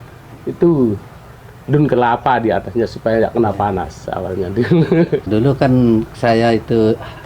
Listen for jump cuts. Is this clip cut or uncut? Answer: uncut